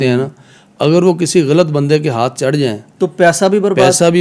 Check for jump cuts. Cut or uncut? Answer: uncut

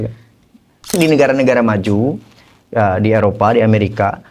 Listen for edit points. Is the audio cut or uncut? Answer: cut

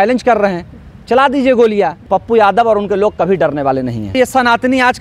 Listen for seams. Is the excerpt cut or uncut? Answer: cut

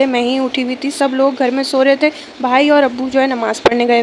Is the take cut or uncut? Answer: uncut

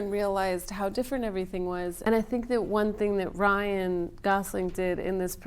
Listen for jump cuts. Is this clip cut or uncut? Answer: cut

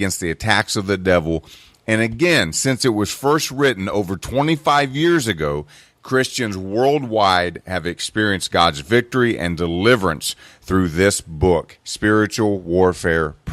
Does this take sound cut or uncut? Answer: cut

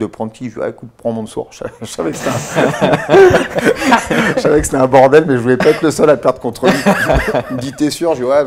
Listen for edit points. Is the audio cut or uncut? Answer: uncut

